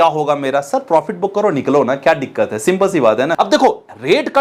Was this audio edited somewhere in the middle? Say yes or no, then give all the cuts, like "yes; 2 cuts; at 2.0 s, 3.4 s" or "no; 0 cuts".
yes; 1 cut; at 3.3 s